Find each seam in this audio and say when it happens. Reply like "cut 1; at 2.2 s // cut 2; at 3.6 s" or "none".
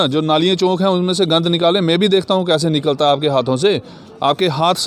none